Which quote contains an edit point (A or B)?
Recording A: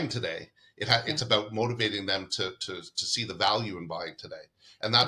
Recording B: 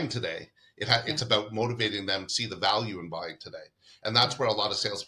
B